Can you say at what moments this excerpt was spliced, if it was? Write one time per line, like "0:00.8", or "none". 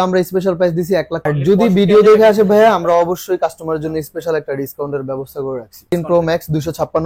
0:01.3
0:05.9